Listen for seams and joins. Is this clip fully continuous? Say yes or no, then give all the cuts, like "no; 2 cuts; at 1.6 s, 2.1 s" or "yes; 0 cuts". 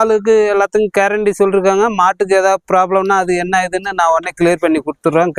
yes; 0 cuts